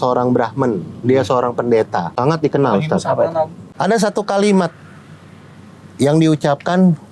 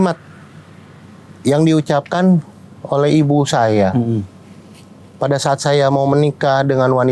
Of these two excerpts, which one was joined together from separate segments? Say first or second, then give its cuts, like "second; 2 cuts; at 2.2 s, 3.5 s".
first; 2 cuts; at 2.1 s, 3.6 s